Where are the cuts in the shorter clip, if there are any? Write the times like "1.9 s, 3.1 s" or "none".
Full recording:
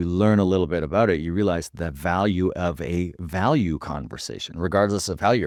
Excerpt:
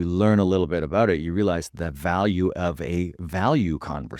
none